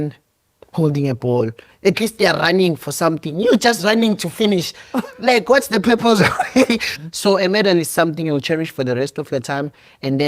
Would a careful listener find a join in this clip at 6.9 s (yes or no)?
yes